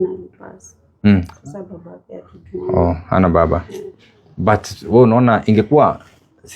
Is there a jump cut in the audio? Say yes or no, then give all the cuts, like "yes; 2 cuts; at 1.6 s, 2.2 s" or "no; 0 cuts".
no; 0 cuts